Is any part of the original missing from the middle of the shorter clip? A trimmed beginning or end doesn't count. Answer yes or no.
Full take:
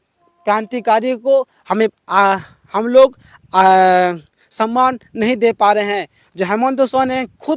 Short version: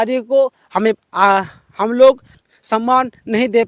yes